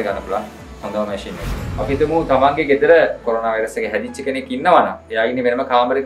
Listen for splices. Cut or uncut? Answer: cut